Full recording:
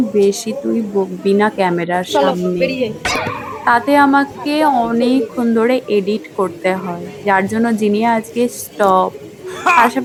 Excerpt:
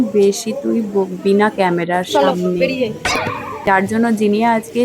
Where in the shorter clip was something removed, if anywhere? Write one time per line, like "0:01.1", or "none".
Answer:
0:03.5